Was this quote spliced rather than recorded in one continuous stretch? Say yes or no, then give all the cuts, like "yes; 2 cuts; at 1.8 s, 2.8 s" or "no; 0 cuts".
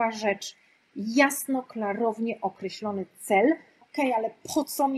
yes; 1 cut; at 3.8 s